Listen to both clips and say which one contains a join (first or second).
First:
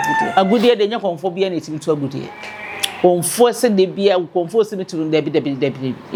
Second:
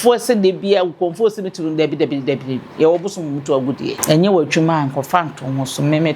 second